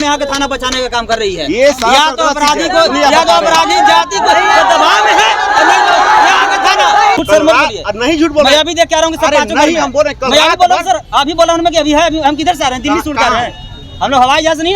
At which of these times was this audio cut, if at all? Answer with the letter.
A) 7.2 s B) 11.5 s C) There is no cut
A